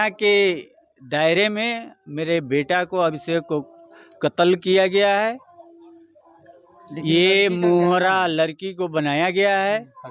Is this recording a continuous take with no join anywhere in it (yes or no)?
yes